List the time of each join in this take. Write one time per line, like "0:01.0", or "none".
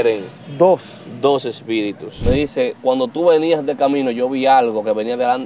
0:02.1